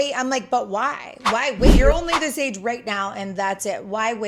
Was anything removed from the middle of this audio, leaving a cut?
yes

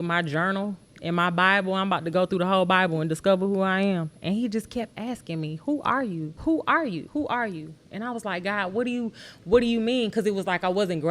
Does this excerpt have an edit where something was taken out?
yes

